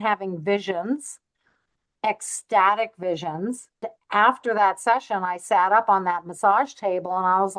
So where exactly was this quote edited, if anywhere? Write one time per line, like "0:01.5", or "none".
0:04.0